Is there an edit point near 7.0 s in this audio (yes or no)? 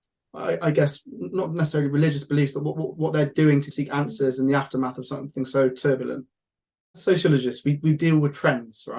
yes